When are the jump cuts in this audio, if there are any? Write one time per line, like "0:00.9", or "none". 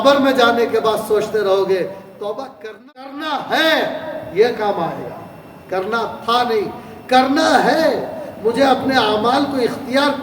0:02.5

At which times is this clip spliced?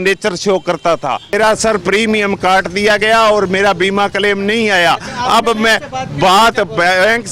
0:01.3

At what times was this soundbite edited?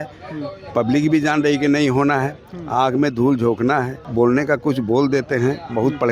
0:04.0

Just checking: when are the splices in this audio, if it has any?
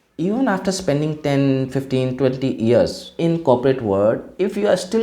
0:03.0

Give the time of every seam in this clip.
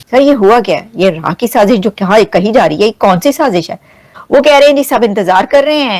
0:04.1

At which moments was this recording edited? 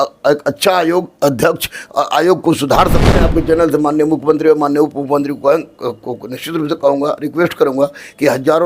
0:03.2

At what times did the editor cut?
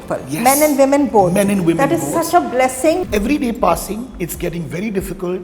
0:03.1

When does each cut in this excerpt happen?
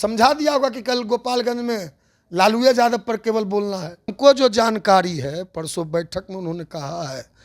0:04.1

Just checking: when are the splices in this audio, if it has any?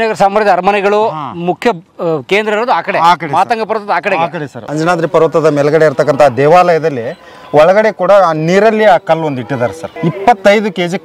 0:04.7
0:09.9

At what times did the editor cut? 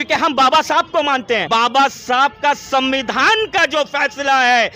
0:01.4

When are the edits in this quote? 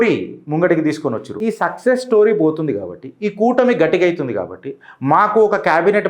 0:01.3

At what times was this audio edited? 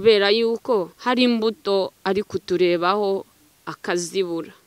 0:00.9

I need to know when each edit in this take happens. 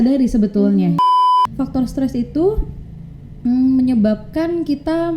0:01.1

